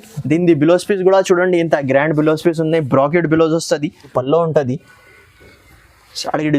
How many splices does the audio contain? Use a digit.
1